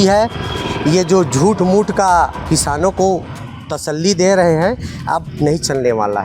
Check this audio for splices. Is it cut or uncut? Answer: uncut